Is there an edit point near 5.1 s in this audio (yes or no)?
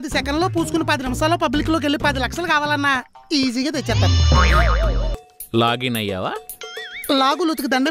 yes